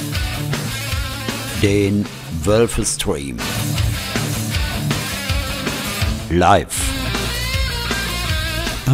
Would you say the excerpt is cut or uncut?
cut